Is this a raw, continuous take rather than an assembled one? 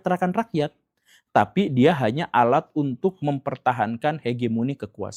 yes; 0 cuts

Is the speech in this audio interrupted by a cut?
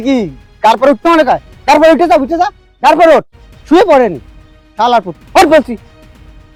no; 0 cuts

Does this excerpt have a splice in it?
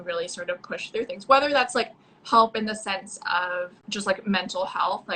yes; 1 cut; at 3.8 s

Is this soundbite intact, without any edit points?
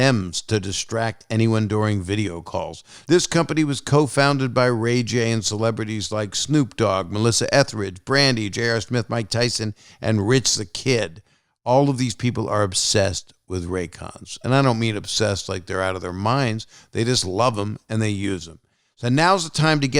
no; 1 cut; at 2.9 s

